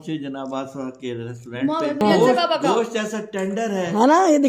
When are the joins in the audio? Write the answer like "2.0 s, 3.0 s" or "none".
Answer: 2.0 s